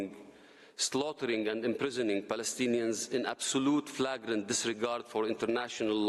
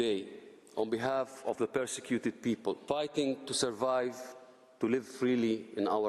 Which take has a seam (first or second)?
second